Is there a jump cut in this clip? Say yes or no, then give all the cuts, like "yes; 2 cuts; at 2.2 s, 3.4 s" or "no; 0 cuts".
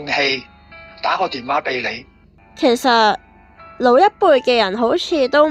yes; 1 cut; at 2.3 s